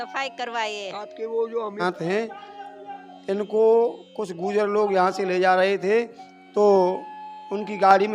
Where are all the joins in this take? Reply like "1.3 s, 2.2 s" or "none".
1.8 s